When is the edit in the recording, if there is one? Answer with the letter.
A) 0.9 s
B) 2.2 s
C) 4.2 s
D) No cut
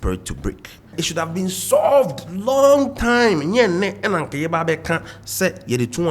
A